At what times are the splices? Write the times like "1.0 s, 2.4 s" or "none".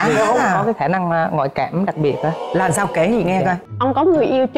3.7 s